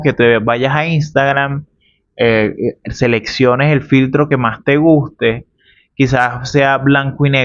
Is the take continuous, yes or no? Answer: yes